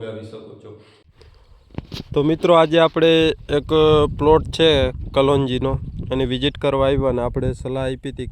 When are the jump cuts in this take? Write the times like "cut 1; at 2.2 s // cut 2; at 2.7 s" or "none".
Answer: cut 1; at 1.2 s